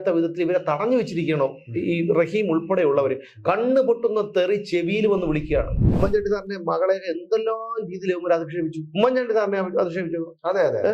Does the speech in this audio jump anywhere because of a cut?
yes; 1 cut; at 5.8 s

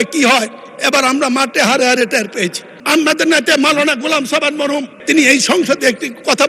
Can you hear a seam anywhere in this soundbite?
yes; 1 cut; at 2.8 s

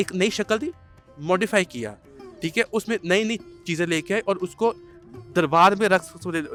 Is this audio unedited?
yes; 0 cuts

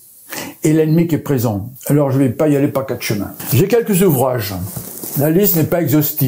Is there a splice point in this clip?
yes; 2 cuts; at 1.7 s, 3.4 s

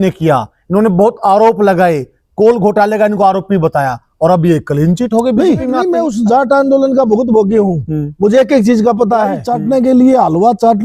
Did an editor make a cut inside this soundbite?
yes; 2 cuts; at 5.9 s, 9.4 s

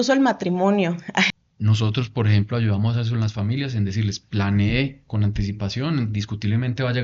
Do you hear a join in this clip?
yes; 1 cut; at 1.3 s

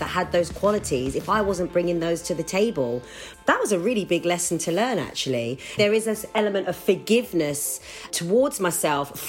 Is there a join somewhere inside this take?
yes; 3 cuts; at 3.2 s, 5.7 s, 8.1 s

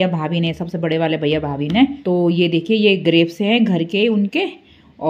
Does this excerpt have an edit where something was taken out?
yes; 1 cut; at 2.0 s

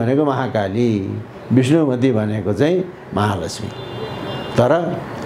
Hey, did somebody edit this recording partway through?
no; 0 cuts

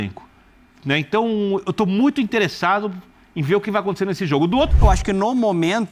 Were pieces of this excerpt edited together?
yes; 1 cut; at 4.7 s

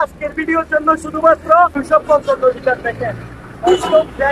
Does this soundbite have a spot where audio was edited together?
yes; 1 cut; at 1.8 s

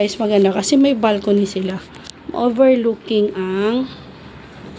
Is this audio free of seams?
yes; 0 cuts

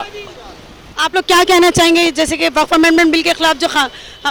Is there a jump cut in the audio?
no; 0 cuts

